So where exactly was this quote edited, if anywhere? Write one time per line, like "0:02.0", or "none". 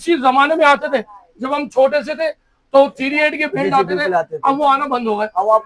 none